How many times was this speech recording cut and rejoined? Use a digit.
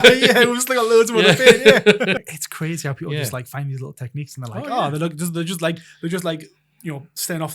1